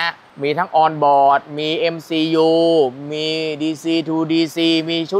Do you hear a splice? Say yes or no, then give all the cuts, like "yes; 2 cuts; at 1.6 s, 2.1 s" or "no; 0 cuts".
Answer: no; 0 cuts